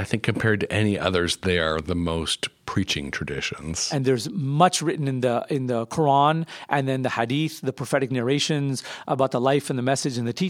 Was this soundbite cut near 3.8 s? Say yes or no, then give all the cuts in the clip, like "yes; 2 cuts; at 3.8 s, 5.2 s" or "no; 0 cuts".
yes; 1 cut; at 3.8 s